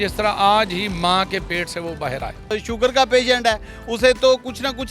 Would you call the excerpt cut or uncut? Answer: cut